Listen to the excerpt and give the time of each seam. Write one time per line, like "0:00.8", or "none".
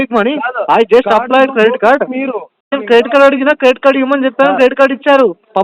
0:02.8